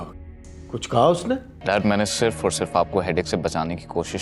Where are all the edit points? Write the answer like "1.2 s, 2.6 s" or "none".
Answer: 1.5 s